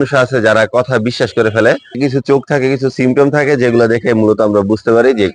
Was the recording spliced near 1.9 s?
yes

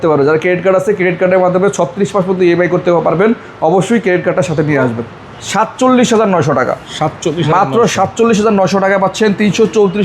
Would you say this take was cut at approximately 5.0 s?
yes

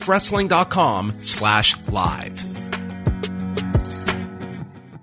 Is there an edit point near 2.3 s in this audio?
yes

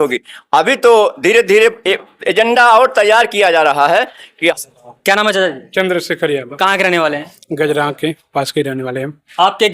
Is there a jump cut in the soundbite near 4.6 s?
yes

